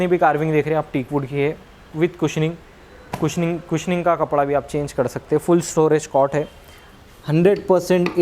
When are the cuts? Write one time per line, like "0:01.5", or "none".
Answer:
none